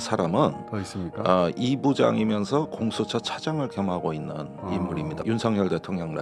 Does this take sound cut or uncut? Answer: cut